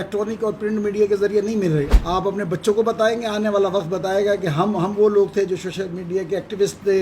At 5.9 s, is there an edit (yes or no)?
no